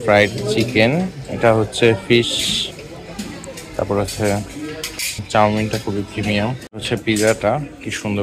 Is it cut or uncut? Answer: cut